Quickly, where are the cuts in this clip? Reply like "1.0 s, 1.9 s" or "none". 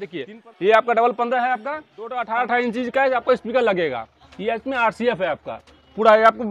2.2 s

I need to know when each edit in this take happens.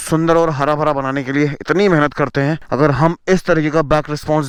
none

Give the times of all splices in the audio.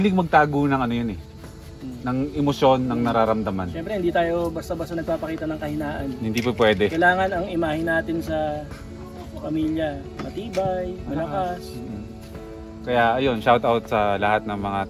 none

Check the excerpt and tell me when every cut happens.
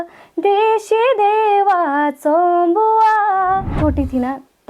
3.8 s

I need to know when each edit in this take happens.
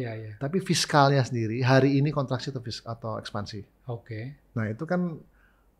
none

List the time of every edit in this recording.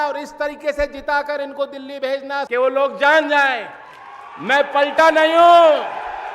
2.4 s

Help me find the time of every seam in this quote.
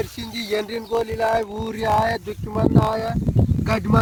none

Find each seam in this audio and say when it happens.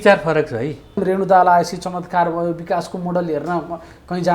1.0 s

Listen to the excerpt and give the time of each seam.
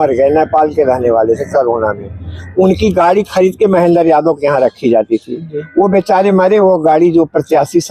none

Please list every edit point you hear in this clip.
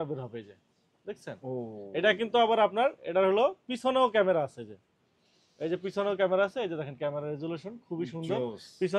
none

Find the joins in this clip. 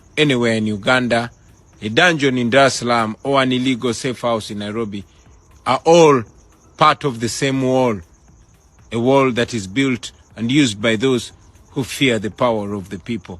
6.9 s

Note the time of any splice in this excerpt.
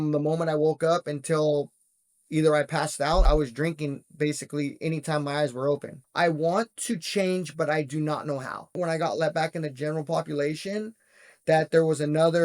3.3 s, 6.0 s, 8.8 s

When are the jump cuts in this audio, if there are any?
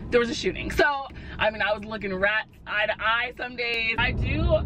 1.1 s, 3.9 s

